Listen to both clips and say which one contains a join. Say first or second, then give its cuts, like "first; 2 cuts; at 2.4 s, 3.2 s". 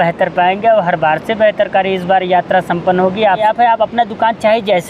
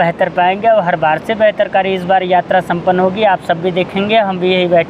first; 1 cut; at 3.4 s